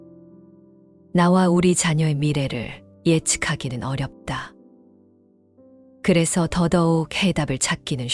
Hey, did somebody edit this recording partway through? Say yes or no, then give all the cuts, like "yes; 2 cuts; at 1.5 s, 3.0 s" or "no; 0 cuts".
yes; 1 cut; at 0.9 s